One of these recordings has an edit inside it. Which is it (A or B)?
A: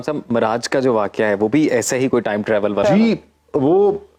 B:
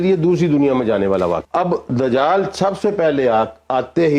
B